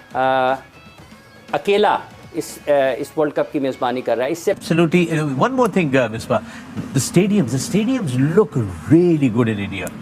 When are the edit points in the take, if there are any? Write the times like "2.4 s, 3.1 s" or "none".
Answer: 4.6 s